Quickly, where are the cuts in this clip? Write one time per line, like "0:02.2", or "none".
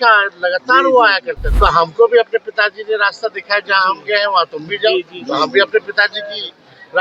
0:01.4